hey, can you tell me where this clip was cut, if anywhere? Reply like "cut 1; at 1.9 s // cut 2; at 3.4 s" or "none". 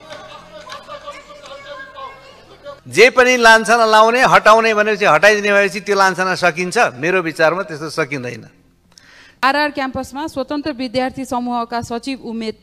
cut 1; at 2.7 s // cut 2; at 9.4 s